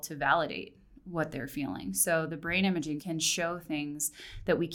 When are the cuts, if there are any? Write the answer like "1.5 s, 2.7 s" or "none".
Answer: 3.0 s

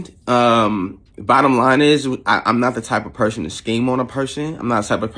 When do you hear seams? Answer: 1.1 s

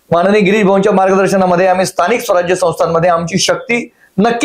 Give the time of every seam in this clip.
none

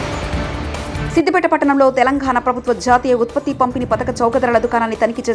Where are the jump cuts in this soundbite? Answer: none

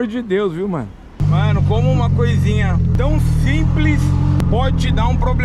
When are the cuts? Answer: 1.2 s, 2.9 s, 4.4 s

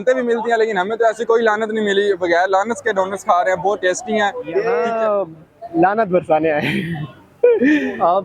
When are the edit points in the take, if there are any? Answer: 4.9 s

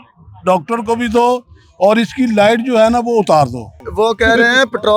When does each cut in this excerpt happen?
3.8 s

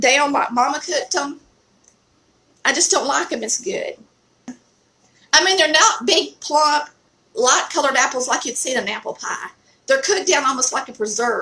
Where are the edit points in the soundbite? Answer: 4.5 s

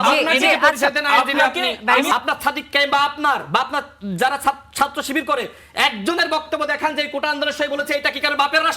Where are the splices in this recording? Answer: 2.1 s

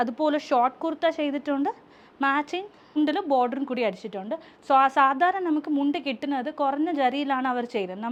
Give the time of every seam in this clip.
none

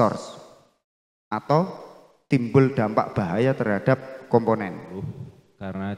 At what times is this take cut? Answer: 4.9 s

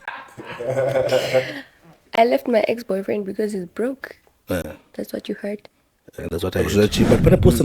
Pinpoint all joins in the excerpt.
6.6 s

